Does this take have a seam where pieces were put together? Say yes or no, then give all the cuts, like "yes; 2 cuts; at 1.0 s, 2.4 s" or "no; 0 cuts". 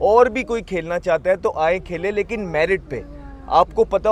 no; 0 cuts